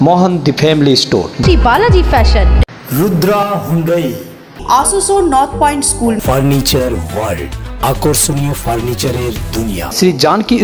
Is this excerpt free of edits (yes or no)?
yes